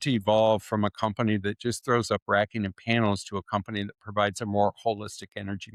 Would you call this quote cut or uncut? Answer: uncut